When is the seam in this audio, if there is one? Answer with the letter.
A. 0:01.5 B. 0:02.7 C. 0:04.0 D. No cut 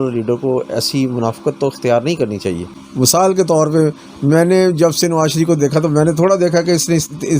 B